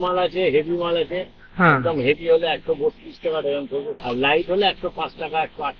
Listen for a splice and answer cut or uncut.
cut